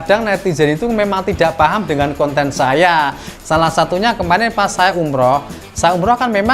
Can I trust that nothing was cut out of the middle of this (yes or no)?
no